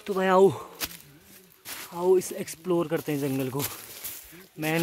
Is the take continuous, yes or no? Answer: yes